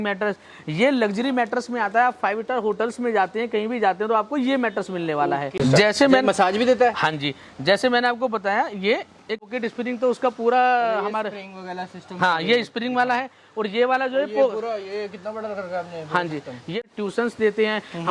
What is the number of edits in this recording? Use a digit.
3